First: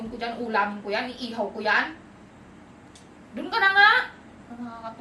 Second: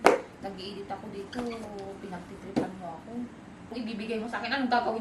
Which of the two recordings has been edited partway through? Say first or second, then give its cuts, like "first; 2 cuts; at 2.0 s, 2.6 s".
second; 1 cut; at 3.7 s